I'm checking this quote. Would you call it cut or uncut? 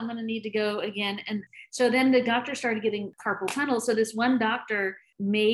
uncut